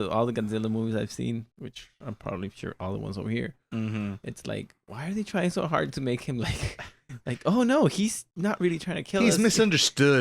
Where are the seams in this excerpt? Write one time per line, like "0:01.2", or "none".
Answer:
0:01.6
0:08.3